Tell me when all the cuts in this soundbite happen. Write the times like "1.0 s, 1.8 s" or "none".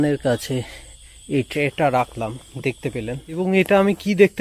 3.4 s